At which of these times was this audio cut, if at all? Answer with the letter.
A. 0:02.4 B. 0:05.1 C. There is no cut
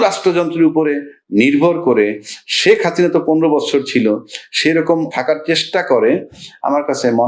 B